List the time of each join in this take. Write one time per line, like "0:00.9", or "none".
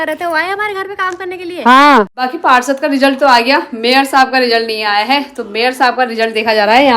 0:02.2